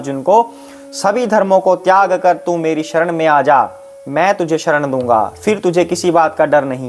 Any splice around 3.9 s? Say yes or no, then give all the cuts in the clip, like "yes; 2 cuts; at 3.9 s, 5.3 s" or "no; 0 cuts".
no; 0 cuts